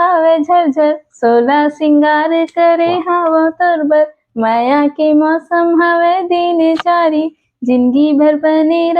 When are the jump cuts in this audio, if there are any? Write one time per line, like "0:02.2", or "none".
none